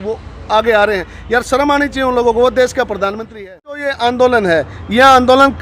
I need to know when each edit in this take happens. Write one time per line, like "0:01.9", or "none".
0:03.9